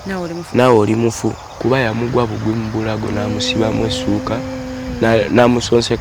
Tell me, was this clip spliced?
yes; 1 cut; at 1.6 s

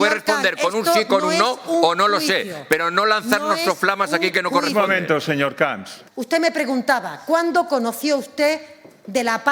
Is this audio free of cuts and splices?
yes; 0 cuts

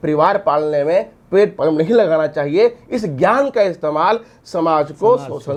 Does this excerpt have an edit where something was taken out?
no; 0 cuts

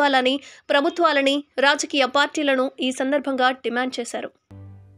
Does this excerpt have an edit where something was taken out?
no; 0 cuts

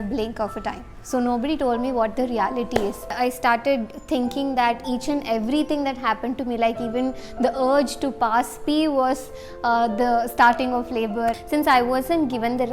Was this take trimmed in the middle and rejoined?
yes; 3 cuts; at 0.9 s, 3.2 s, 11.3 s

